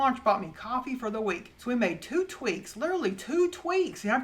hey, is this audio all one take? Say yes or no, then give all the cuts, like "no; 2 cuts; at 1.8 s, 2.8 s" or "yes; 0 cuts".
no; 1 cut; at 1.5 s